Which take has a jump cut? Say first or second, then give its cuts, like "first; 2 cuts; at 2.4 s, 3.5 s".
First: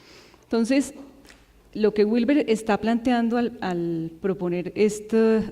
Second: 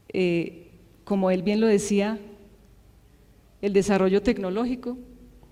first; 1 cut; at 3.5 s